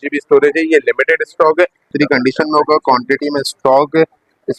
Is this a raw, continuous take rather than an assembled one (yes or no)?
no